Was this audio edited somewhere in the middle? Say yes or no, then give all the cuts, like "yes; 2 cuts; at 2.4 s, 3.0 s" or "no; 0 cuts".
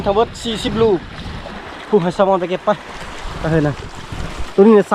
yes; 1 cut; at 1.6 s